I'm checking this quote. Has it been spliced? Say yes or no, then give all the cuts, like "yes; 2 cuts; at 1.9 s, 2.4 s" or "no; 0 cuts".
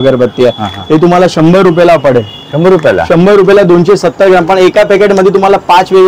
no; 0 cuts